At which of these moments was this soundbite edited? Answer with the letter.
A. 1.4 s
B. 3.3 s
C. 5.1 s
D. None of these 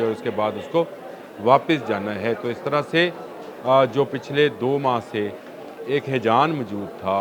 D